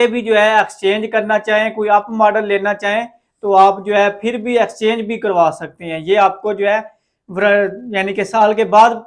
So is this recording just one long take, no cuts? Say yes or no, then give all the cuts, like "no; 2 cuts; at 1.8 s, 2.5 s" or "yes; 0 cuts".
yes; 0 cuts